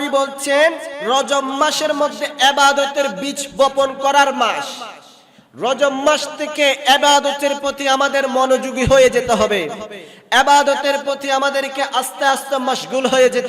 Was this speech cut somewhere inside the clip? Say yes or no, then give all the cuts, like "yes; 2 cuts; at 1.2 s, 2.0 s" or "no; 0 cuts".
yes; 1 cut; at 0.9 s